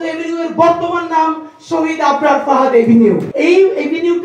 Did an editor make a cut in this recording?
yes; 1 cut; at 3.3 s

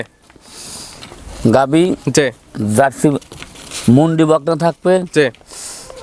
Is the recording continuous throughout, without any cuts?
yes; 0 cuts

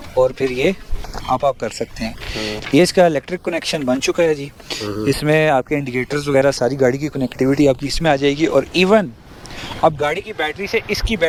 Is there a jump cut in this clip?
no; 0 cuts

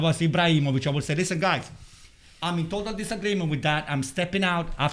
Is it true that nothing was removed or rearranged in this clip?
yes; 0 cuts

